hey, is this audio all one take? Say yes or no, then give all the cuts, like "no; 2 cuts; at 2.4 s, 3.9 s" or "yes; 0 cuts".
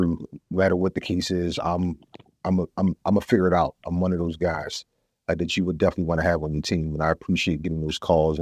yes; 0 cuts